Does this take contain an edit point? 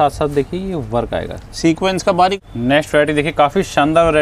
yes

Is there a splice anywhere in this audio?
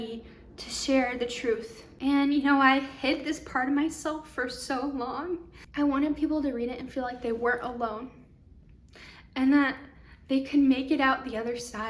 yes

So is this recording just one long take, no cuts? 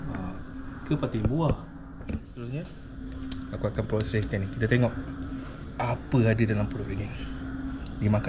no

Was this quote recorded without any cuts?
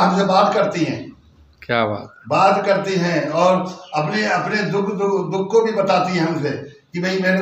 yes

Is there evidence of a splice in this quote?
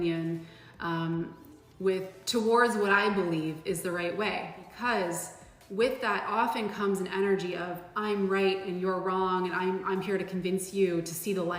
yes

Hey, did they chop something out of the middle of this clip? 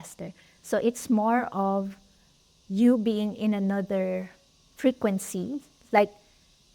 no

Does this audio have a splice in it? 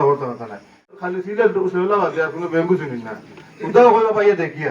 yes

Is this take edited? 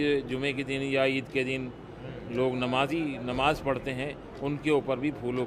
no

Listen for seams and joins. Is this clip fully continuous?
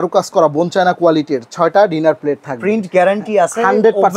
yes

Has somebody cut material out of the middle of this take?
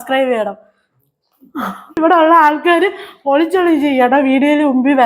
yes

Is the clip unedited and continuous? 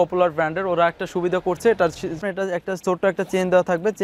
no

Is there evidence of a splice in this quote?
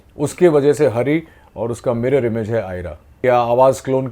yes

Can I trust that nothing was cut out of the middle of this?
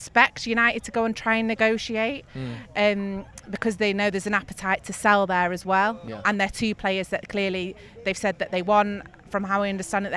yes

